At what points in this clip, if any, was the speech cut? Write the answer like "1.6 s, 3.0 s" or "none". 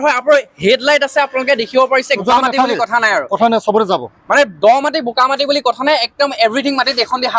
2.2 s